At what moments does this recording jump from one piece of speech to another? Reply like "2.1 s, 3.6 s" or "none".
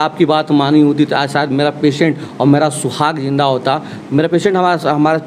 none